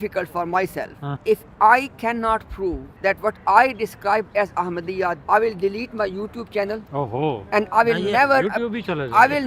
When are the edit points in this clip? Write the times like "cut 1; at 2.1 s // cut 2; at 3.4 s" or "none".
cut 1; at 1.1 s // cut 2; at 2.9 s // cut 3; at 5.2 s